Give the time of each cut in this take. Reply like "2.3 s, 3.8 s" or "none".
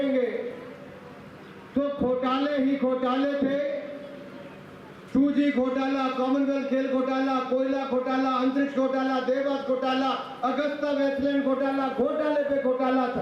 none